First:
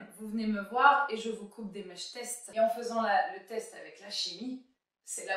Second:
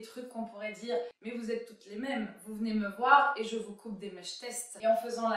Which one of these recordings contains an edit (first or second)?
second